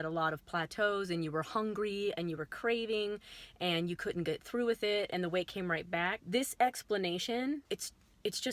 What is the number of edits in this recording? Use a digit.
2